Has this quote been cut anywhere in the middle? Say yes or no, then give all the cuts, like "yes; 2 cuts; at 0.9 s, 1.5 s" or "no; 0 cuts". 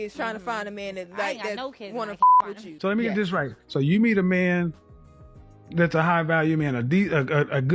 yes; 1 cut; at 2.6 s